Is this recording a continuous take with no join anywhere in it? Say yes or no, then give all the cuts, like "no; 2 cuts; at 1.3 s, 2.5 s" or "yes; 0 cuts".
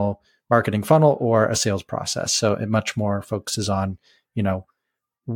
yes; 0 cuts